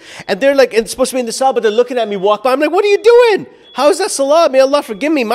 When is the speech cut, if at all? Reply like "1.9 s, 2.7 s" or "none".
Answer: none